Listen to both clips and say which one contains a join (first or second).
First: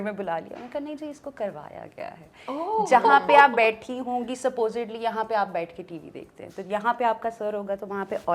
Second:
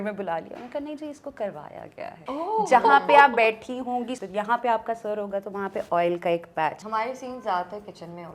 second